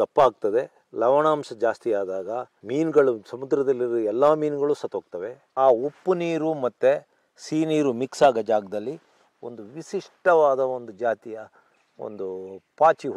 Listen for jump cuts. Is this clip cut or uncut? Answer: cut